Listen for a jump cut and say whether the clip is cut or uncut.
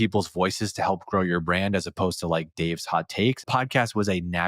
cut